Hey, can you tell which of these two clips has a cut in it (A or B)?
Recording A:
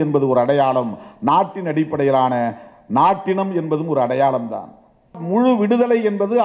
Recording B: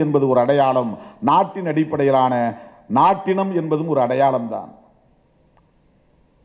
A